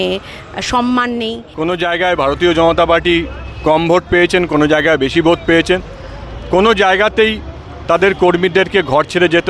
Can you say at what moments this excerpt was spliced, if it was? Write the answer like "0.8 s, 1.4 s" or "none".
1.4 s